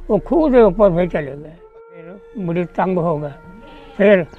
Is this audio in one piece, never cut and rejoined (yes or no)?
no